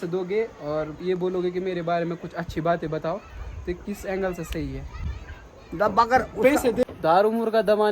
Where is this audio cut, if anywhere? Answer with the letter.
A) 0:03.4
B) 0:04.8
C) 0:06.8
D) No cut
C